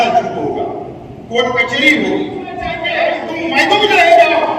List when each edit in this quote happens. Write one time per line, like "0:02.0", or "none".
0:02.8